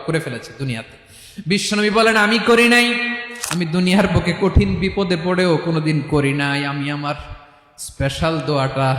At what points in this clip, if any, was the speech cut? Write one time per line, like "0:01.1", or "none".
0:03.2